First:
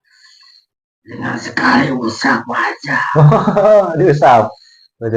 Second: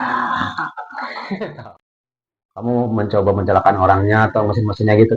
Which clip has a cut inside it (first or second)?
second